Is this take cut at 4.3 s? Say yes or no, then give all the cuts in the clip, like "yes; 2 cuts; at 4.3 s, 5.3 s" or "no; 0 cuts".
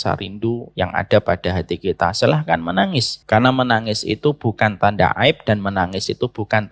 no; 1 cut; at 3.1 s